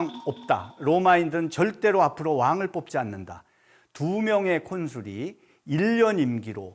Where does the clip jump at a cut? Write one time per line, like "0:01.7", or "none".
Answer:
none